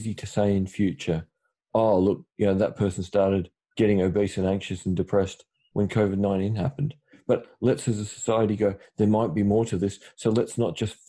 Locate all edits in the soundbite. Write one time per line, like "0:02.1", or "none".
0:03.6
0:05.6